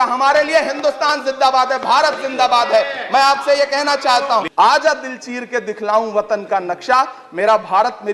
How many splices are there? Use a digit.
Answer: 1